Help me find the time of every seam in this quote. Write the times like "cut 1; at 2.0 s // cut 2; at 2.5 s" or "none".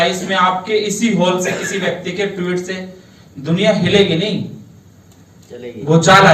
none